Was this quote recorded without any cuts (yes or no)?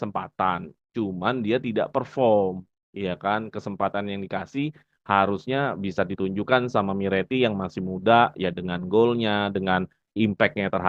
yes